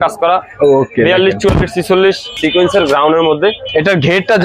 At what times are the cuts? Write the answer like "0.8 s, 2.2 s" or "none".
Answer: 2.3 s

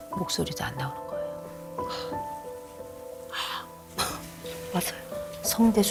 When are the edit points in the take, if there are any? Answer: none

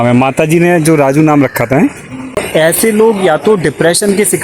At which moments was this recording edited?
2.4 s

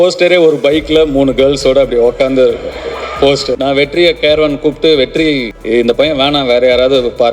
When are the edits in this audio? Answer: 3.5 s, 5.5 s

